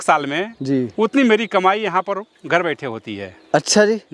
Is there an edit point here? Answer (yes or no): no